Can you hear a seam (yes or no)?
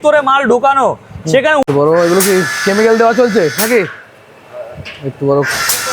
yes